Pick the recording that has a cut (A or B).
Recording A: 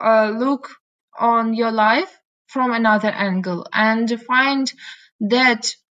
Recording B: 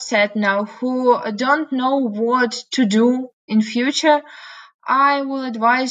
B